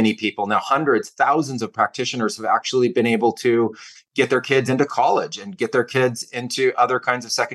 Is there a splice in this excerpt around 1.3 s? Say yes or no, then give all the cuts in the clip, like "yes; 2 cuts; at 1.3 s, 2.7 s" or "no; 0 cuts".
no; 0 cuts